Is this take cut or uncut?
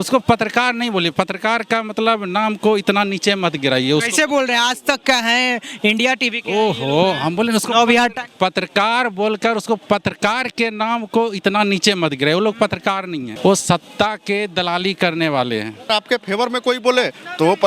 cut